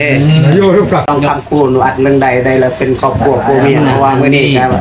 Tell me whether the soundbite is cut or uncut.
cut